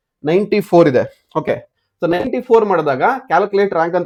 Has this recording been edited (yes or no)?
no